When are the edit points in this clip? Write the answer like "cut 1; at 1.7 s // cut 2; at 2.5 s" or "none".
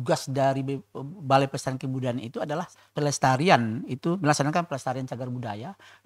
cut 1; at 2.8 s